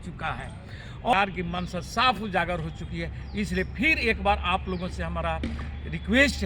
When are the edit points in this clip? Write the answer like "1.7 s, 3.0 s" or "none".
1.1 s